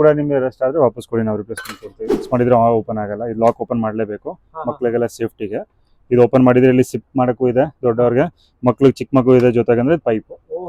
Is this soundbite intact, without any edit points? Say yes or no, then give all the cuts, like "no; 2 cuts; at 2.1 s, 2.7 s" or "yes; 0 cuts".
no; 1 cut; at 2.3 s